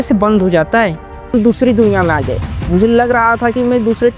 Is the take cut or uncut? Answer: cut